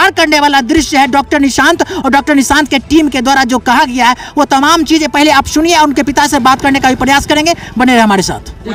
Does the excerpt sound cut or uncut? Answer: uncut